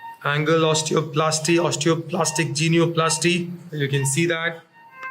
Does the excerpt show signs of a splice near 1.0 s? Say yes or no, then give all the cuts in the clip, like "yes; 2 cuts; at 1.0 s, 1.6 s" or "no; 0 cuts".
no; 1 cut; at 3.6 s